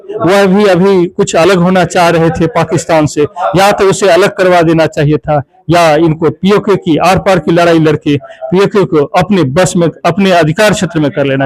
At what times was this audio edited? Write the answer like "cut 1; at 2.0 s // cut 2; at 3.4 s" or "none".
none